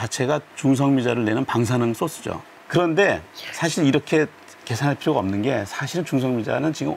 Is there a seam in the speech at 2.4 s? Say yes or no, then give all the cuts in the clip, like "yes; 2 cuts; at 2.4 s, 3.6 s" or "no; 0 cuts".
yes; 1 cut; at 2.4 s